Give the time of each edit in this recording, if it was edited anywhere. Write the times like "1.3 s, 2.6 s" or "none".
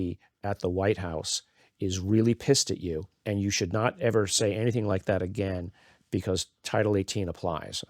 3.1 s